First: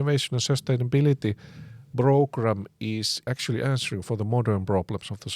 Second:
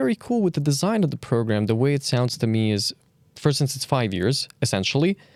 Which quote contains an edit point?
first; 1 cut; at 3.2 s

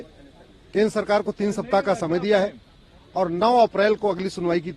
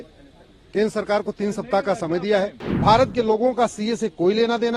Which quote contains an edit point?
second; 1 cut; at 2.6 s

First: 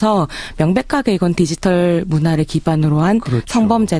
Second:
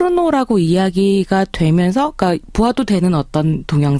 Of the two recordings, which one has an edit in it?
second; 1 cut; at 2.3 s

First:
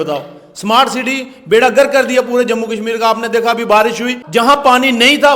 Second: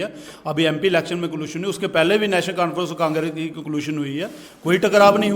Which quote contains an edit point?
first; 1 cut; at 4.2 s

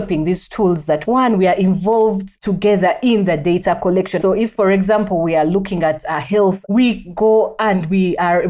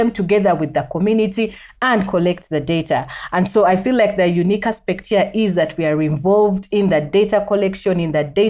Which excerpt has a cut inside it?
first; 3 cuts; at 1.0 s, 4.3 s, 6.6 s

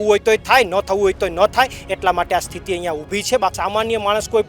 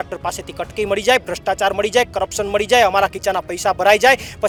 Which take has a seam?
first; 1 cut; at 3.6 s

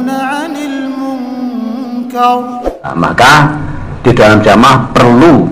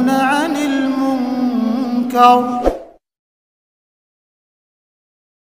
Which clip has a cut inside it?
first; 1 cut; at 2.9 s

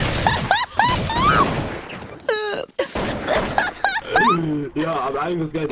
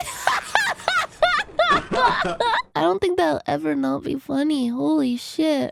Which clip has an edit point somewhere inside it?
first; 1 cut; at 2.6 s

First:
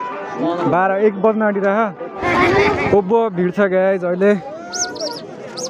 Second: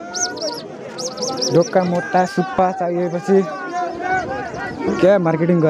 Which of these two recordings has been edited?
first; 1 cut; at 2.1 s

